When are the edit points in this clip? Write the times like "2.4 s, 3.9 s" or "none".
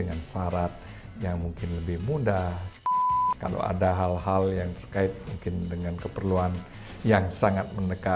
3.0 s